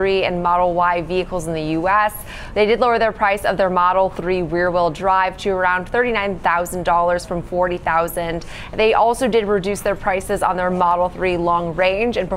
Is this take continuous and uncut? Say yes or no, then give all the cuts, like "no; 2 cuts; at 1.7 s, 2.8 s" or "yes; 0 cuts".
yes; 0 cuts